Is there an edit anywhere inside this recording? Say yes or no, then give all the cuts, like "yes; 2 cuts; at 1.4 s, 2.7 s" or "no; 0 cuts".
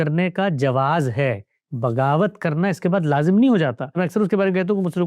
yes; 1 cut; at 3.9 s